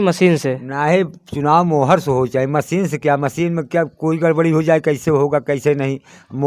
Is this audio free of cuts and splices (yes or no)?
yes